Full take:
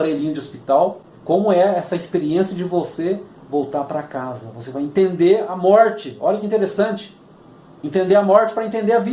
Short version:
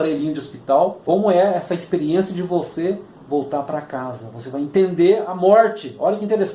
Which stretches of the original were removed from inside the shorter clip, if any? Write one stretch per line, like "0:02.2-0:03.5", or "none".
0:01.0-0:01.2